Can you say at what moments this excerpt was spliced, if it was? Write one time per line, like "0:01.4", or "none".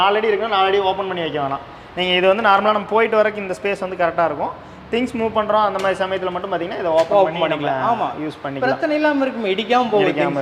none

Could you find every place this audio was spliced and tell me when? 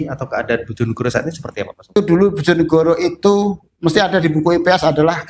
0:02.0

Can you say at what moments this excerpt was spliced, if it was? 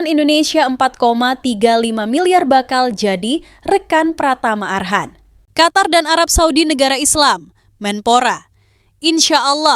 0:05.4

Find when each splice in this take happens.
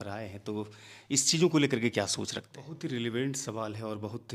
0:02.6

